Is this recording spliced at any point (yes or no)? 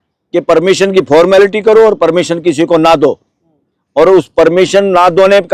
no